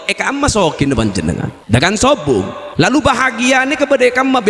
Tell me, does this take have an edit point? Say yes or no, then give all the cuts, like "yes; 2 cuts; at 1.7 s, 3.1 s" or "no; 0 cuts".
yes; 2 cuts; at 1.5 s, 2.6 s